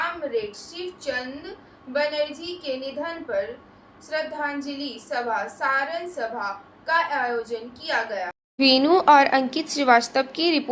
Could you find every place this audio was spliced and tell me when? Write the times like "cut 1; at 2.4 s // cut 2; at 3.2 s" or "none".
none